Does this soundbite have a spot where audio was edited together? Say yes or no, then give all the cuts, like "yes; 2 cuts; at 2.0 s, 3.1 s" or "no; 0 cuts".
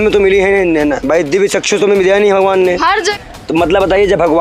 yes; 1 cut; at 3.2 s